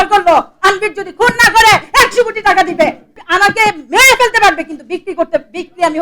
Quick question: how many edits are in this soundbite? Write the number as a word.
one